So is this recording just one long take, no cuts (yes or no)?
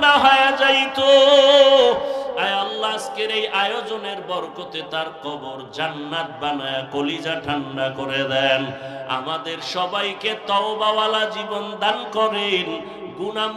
yes